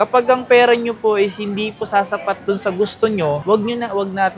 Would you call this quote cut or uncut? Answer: uncut